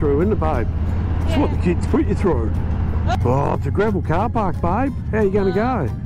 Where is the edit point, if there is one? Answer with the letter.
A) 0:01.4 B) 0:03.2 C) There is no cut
B